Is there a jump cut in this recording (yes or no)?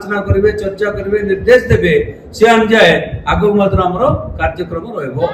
no